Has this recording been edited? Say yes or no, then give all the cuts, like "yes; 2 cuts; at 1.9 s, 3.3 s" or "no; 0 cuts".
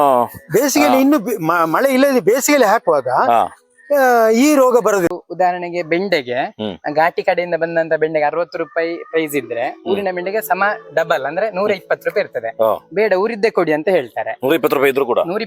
yes; 1 cut; at 5.2 s